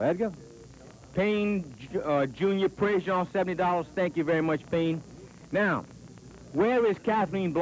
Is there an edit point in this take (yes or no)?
no